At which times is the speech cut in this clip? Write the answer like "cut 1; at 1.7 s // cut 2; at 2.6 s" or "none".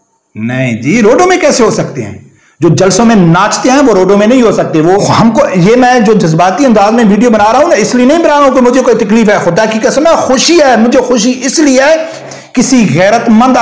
cut 1; at 5.1 s // cut 2; at 12.2 s